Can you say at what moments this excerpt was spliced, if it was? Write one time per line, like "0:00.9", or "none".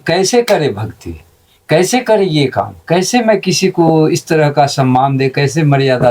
none

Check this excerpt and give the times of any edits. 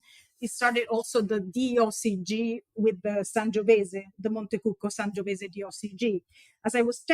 none

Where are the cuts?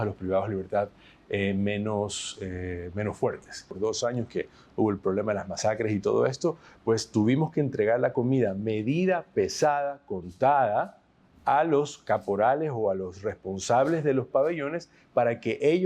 0:03.7

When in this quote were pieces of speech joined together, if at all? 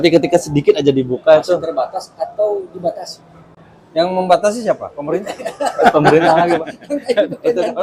none

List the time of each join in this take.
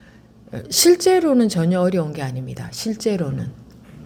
none

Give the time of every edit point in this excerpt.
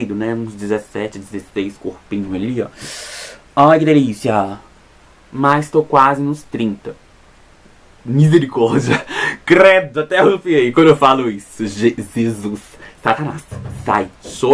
none

